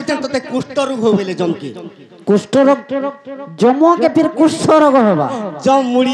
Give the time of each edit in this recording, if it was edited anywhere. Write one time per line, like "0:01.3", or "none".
none